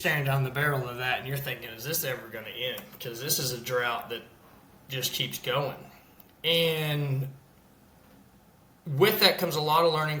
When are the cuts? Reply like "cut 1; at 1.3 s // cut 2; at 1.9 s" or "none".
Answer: none